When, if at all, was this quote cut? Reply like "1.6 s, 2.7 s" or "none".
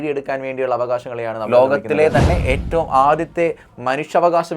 1.4 s